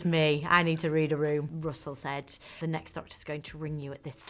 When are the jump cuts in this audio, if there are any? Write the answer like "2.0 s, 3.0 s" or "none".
1.5 s, 2.6 s